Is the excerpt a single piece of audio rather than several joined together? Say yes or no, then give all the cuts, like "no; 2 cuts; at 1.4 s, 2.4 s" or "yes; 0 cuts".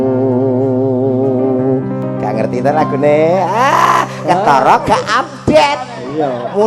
yes; 0 cuts